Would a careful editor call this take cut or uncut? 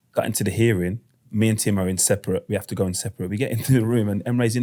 uncut